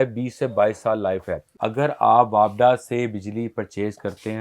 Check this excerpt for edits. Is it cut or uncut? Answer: cut